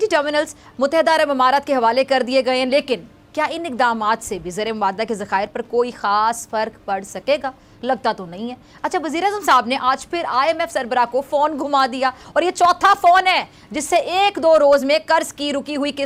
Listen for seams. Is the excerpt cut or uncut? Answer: uncut